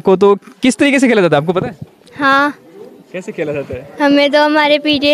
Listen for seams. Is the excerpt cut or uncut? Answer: uncut